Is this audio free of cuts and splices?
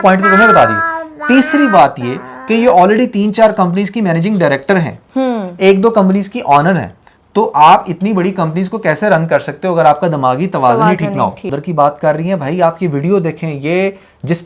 no; 1 cut; at 11.5 s

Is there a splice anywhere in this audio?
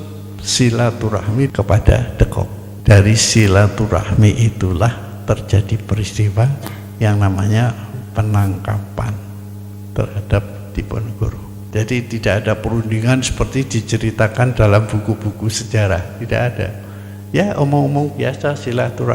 yes; 3 cuts; at 1.5 s, 2.6 s, 11.6 s

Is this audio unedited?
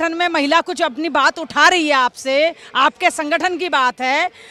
yes; 0 cuts

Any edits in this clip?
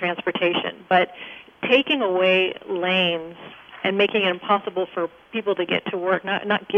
no; 0 cuts

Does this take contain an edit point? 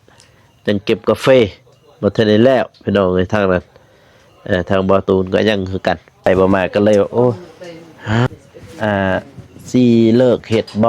yes; 1 cut; at 6.3 s

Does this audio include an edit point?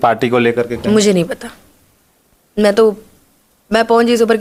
no; 0 cuts

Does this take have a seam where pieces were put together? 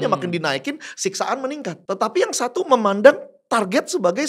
yes; 1 cut; at 1.8 s

